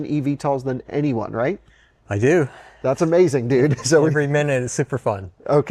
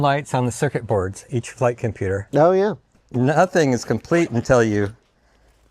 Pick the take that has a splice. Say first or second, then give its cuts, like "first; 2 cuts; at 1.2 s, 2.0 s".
second; 1 cut; at 2.9 s